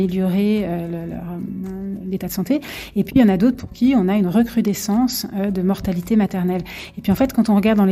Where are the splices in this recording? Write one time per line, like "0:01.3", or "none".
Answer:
none